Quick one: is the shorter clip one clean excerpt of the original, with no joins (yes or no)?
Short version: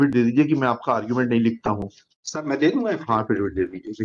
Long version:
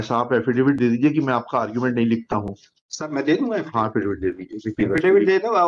yes